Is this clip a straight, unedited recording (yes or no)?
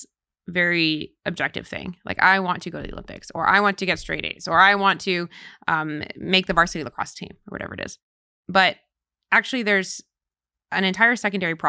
yes